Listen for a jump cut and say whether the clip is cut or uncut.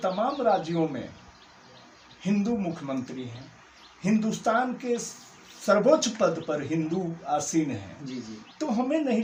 uncut